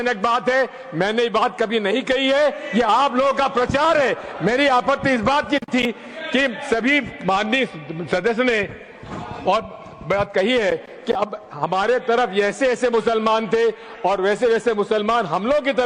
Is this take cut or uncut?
uncut